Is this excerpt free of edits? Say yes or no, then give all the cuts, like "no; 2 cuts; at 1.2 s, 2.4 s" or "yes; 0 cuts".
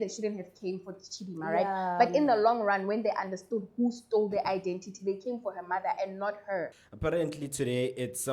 no; 1 cut; at 6.8 s